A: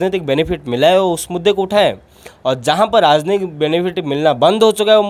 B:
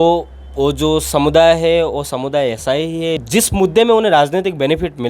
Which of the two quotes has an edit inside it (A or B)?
B